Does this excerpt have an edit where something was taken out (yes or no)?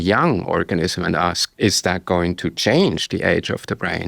yes